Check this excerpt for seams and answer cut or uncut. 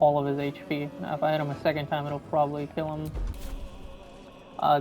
cut